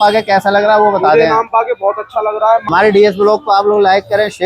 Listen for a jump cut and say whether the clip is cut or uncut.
cut